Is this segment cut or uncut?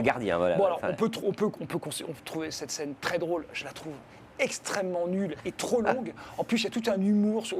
uncut